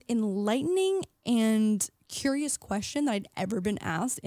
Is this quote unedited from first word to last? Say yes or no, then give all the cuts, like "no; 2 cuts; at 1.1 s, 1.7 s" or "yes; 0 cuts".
yes; 0 cuts